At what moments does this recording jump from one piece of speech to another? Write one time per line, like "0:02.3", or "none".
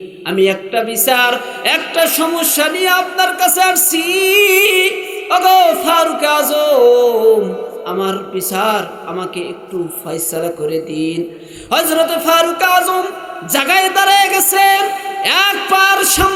none

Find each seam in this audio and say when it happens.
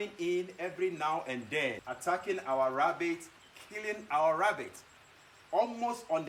none

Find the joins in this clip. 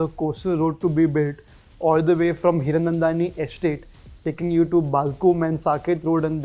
none

